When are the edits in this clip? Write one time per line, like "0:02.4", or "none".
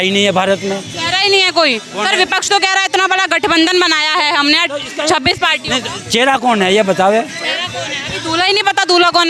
none